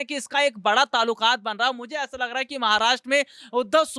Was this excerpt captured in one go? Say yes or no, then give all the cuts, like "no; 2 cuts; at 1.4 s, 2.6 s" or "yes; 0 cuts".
yes; 0 cuts